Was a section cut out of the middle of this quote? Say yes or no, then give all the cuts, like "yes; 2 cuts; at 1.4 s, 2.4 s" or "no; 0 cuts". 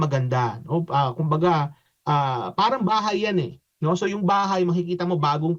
no; 0 cuts